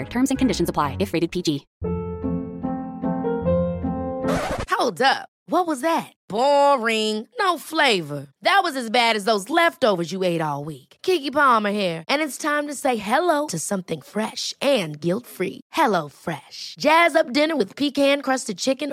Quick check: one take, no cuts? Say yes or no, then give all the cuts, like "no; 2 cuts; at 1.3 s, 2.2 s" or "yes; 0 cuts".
no; 1 cut; at 1.7 s